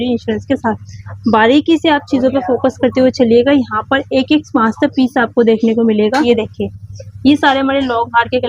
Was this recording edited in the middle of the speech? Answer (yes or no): yes